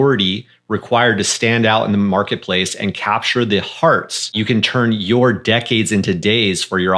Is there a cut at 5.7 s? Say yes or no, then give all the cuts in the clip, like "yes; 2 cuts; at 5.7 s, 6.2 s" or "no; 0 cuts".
no; 1 cut; at 4.3 s